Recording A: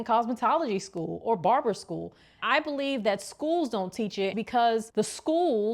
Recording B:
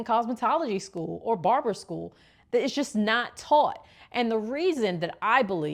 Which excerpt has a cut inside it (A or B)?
A